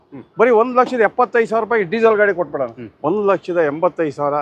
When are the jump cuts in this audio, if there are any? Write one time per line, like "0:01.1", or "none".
0:02.8